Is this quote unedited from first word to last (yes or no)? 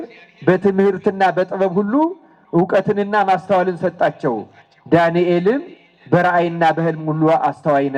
yes